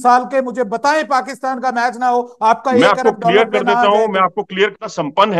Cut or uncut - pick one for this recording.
uncut